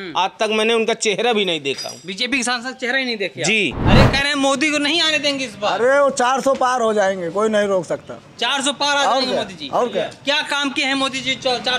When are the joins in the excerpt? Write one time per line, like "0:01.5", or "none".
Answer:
0:03.8